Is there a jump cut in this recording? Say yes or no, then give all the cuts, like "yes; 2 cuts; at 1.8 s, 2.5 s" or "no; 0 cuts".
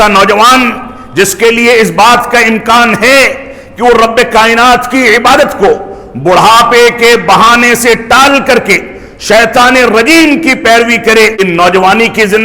yes; 1 cut; at 11.4 s